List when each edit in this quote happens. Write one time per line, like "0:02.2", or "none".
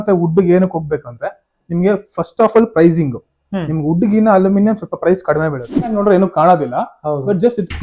0:05.9